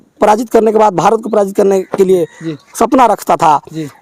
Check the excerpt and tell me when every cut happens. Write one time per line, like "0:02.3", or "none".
none